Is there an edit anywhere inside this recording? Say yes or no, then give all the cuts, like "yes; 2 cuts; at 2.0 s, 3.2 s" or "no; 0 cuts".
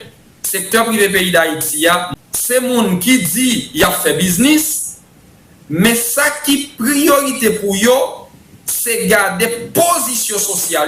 yes; 1 cut; at 2.1 s